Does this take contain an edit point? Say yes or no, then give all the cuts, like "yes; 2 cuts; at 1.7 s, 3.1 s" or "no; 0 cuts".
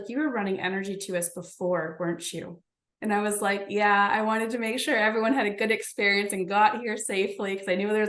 no; 0 cuts